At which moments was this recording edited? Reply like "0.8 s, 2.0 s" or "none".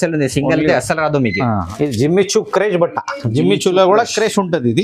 1.7 s

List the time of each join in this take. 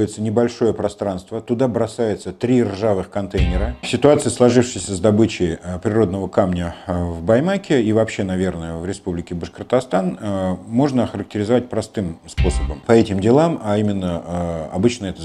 3.9 s, 12.7 s

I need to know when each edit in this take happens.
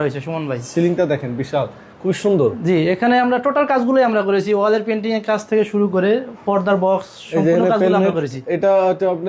none

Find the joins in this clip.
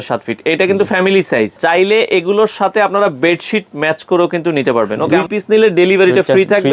1.6 s, 5.0 s

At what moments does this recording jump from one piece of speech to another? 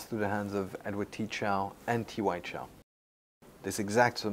3.3 s

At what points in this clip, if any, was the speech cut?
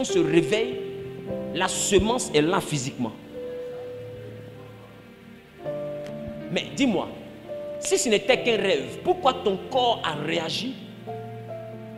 none

